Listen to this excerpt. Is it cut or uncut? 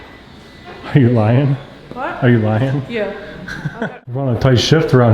cut